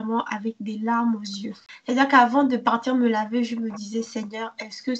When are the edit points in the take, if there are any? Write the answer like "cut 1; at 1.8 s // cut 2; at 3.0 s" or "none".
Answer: cut 1; at 1.7 s